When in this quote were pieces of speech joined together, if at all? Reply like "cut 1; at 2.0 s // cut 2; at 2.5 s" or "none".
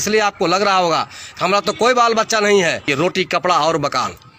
cut 1; at 2.9 s